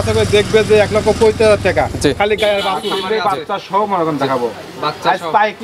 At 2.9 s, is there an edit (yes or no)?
yes